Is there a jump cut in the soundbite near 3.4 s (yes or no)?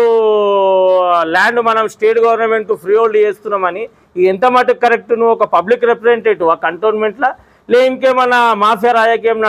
no